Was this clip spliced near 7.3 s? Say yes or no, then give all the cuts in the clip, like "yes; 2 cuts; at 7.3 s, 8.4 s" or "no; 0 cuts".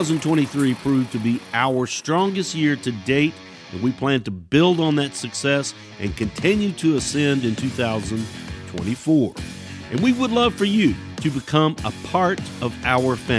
no; 2 cuts; at 11.1 s, 12.5 s